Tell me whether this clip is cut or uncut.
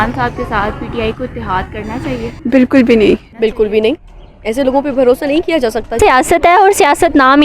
cut